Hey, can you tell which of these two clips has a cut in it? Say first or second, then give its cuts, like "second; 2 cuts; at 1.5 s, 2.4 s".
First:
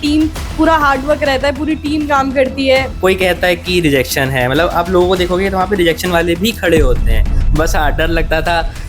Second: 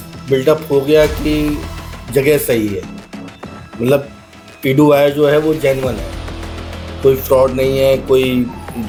first; 2 cuts; at 2.9 s, 7.4 s